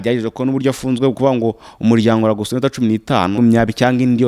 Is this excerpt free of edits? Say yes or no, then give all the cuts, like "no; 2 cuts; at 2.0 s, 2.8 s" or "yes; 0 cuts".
no; 1 cut; at 3.3 s